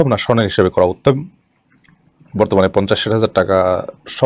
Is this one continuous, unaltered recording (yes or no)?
yes